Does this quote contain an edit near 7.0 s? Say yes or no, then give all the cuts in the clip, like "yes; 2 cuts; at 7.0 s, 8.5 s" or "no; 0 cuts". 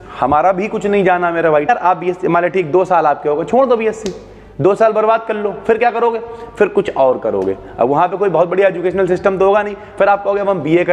no; 1 cut; at 1.7 s